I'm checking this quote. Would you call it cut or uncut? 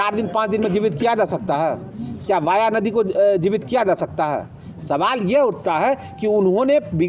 uncut